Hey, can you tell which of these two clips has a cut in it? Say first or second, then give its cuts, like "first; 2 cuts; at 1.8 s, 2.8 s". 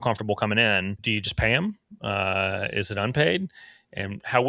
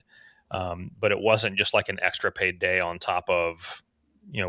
first; 1 cut; at 1.0 s